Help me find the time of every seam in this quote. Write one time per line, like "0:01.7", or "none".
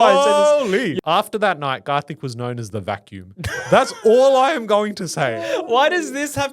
0:00.9